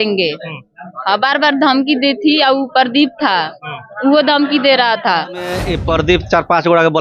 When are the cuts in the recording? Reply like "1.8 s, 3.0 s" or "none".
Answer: 5.7 s

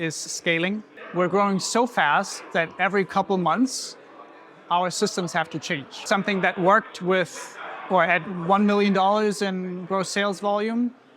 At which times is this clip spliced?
1.0 s, 6.0 s

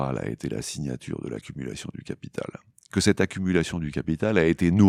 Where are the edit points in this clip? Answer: none

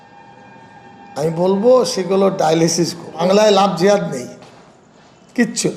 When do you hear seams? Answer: 3.2 s

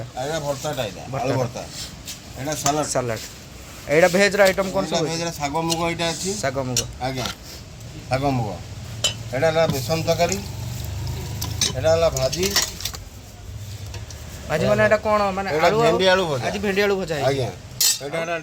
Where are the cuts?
none

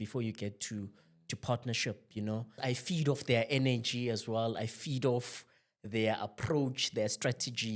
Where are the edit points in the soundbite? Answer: 2.6 s

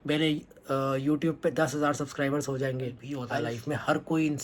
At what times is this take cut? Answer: 3.1 s

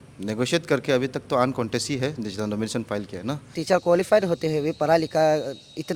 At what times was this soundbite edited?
3.6 s

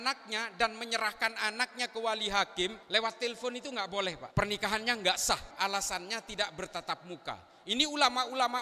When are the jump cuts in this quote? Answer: 2.8 s, 4.2 s, 5.5 s

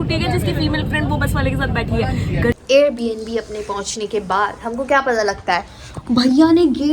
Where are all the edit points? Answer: 2.5 s

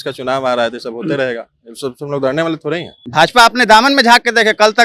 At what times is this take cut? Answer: 3.0 s

